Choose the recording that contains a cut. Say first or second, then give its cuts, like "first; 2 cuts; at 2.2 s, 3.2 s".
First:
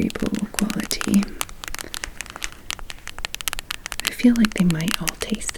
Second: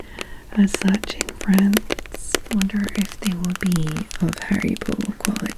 second; 1 cut; at 2.4 s